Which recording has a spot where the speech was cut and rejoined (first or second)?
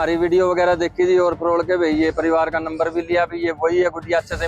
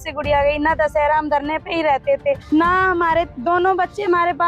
second